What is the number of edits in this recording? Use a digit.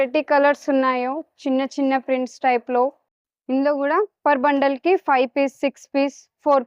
1